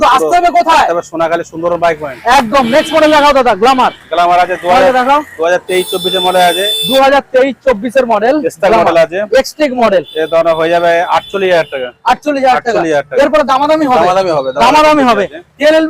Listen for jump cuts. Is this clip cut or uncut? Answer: uncut